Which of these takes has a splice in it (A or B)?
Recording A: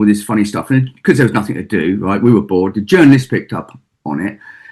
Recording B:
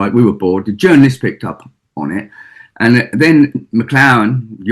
B